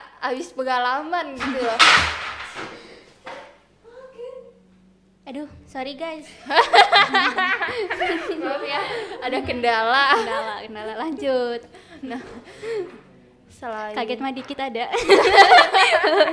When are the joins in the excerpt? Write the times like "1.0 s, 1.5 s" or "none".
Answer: 4.4 s